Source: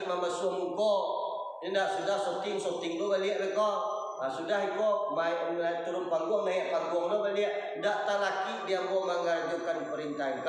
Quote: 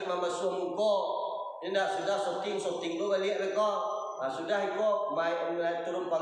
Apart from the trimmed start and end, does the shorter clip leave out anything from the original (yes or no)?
no